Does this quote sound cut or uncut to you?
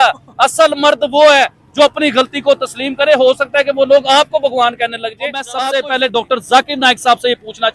cut